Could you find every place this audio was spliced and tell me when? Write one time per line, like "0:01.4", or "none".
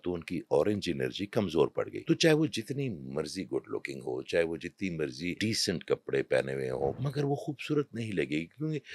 0:02.0
0:05.4
0:06.9